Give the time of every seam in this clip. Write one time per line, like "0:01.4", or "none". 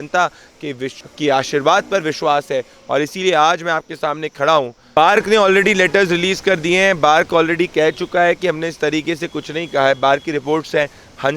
0:05.0